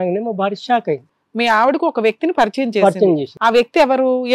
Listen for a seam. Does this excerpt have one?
yes; 1 cut; at 1.1 s

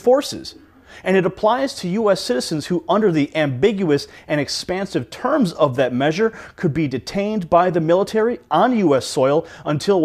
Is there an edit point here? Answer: yes; 1 cut; at 3.2 s

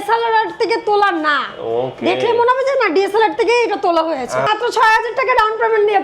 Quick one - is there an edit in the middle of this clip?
yes; 1 cut; at 4.5 s

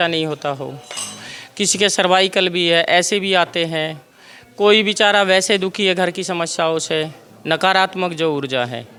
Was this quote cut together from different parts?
no; 0 cuts

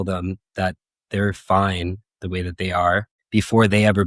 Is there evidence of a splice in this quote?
yes; 1 cut; at 3.2 s

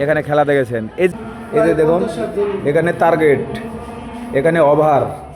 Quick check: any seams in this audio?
yes; 1 cut; at 1.1 s

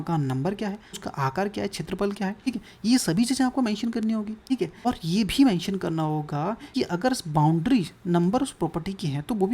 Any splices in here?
yes; 4 cuts; at 1.0 s, 2.5 s, 4.9 s, 6.6 s

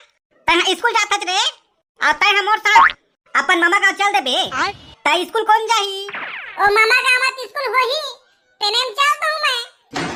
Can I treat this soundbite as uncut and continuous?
yes; 0 cuts

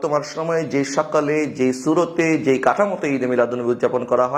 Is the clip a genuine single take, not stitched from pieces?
yes; 0 cuts

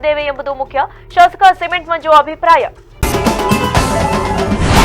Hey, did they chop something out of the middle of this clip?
yes; 1 cut; at 2.9 s

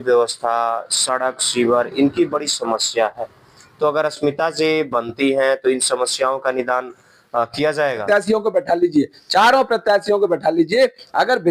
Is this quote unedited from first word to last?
no; 1 cut; at 8.0 s

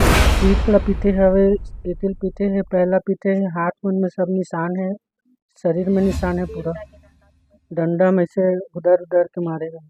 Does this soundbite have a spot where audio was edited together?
no; 0 cuts

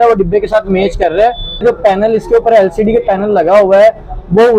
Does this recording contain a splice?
yes; 1 cut; at 1.6 s

